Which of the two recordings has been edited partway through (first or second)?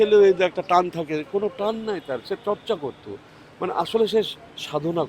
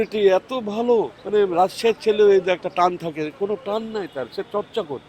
second